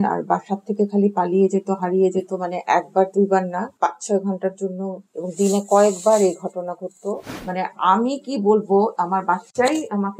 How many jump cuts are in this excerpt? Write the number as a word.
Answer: one